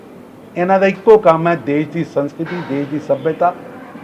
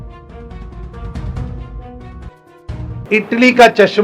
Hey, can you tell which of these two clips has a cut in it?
second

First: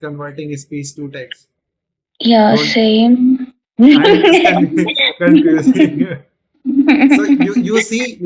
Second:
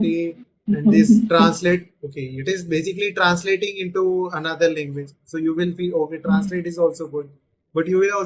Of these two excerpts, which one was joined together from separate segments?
first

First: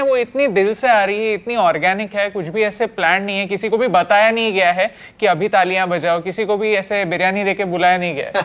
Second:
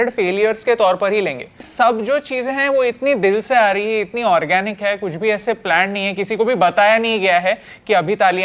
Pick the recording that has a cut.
second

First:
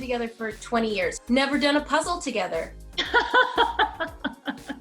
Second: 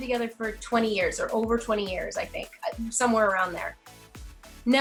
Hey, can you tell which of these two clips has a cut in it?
first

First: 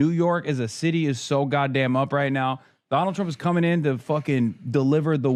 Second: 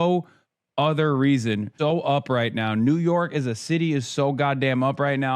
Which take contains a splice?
second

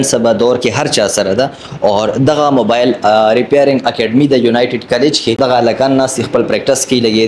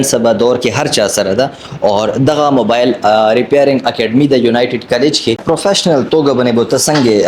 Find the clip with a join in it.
second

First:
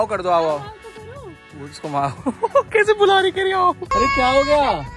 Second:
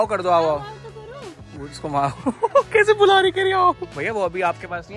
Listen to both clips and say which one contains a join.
first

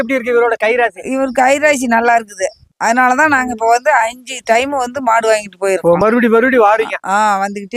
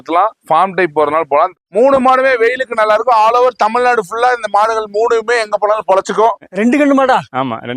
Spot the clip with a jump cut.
second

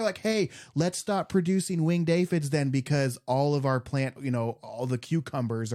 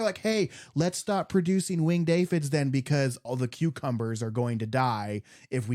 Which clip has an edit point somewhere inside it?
second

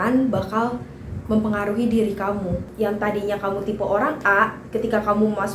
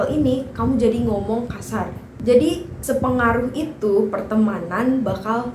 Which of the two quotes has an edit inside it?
second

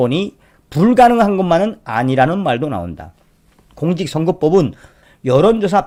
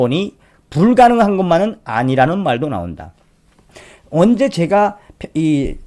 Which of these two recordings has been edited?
second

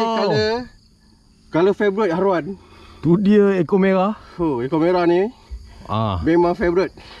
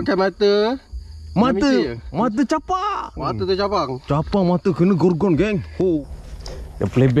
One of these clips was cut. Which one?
second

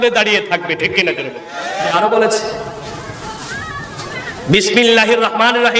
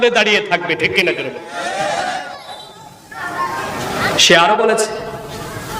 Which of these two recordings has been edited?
first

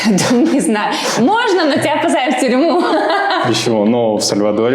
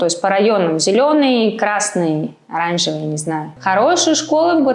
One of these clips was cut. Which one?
second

